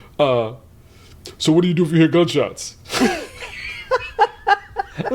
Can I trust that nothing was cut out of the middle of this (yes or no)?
yes